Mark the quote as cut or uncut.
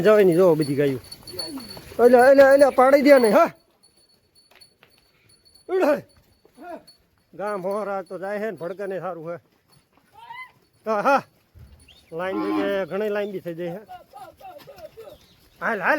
uncut